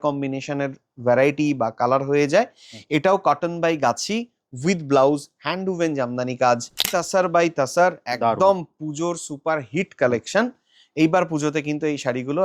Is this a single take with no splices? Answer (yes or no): no